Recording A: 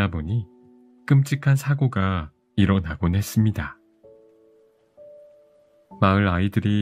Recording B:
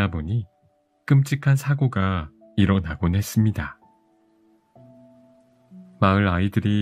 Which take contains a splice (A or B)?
B